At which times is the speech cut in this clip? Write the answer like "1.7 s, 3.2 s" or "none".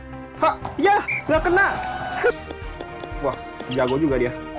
2.3 s

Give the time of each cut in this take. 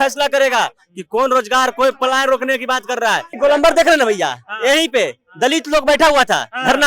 3.3 s

